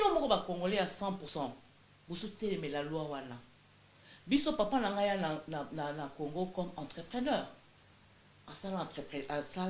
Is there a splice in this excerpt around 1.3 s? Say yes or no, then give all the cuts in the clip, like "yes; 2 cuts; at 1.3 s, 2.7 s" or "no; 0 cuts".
yes; 1 cut; at 1.3 s